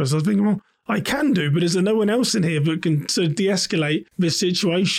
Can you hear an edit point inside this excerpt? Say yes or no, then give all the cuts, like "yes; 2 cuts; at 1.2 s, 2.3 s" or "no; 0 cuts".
yes; 1 cut; at 4.1 s